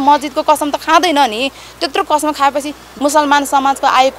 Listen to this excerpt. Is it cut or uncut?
cut